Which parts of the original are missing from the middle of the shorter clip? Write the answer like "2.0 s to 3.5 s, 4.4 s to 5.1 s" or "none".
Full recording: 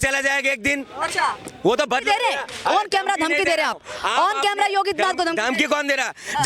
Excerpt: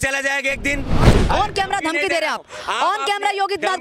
1.1 s to 2.5 s

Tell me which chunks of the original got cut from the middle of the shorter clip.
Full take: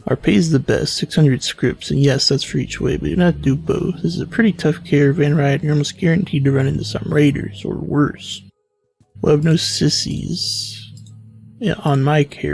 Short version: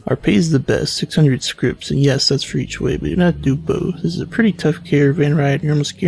none

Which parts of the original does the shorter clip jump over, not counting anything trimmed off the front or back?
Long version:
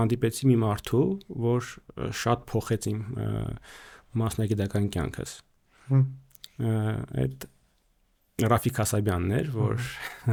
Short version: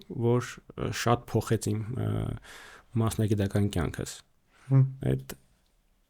6.2 s to 7.1 s

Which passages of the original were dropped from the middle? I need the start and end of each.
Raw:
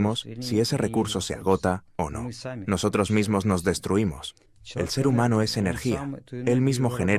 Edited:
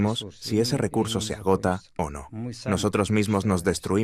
none

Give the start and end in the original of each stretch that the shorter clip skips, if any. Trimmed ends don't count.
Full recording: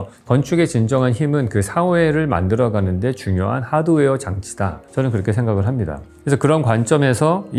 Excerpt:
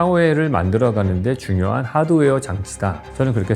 none

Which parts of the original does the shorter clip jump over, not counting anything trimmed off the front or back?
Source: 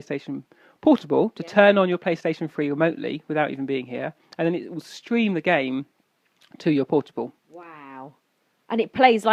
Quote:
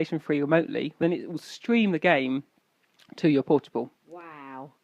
3.3 s to 4.4 s

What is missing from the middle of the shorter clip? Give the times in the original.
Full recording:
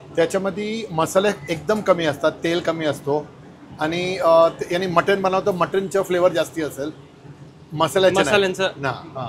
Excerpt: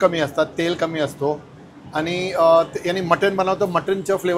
none

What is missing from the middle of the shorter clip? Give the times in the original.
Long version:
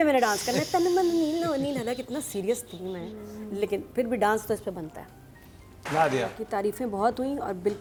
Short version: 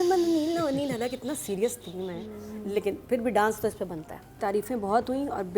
5.2 s to 6.4 s

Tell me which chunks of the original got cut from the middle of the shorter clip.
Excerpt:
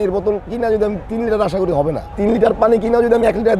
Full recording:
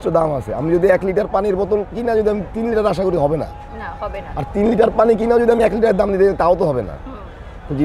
3.5 s to 4.5 s

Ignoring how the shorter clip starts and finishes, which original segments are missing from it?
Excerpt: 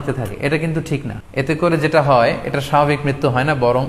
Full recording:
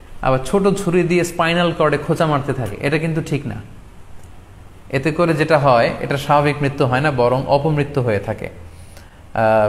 3.6 s to 4.7 s

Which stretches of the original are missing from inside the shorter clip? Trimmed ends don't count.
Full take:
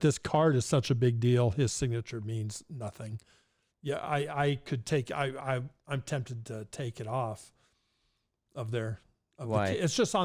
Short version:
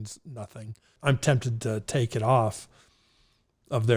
3.3 s to 5.8 s

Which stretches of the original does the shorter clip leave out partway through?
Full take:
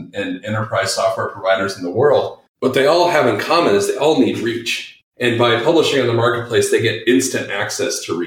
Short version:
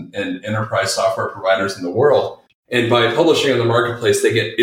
2.4 s to 4.9 s

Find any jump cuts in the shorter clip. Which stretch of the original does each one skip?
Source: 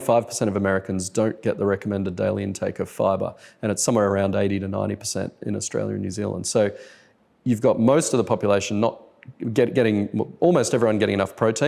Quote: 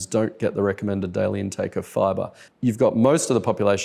3.4 s to 7.2 s

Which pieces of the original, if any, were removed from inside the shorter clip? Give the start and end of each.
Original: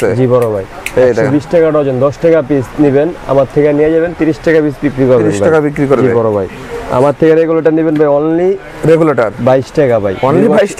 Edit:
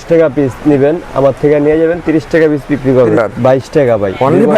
5.3 s to 9.2 s

